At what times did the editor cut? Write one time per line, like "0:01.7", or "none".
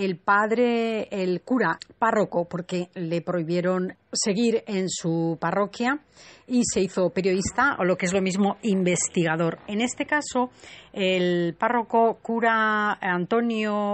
0:05.9